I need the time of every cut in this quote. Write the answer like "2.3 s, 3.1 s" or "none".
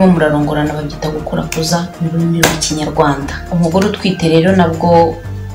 3.3 s